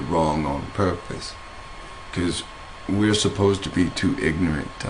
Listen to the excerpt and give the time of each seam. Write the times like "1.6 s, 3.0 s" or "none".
1.0 s